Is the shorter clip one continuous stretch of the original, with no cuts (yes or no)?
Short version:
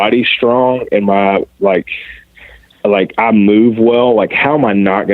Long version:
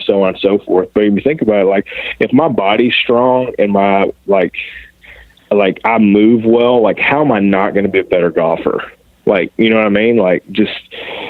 yes